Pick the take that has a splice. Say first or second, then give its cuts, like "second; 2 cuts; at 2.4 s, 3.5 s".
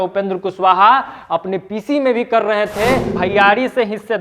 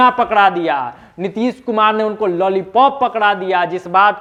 first; 1 cut; at 3.1 s